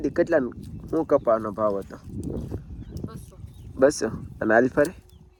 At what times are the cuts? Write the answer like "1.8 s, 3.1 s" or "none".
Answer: none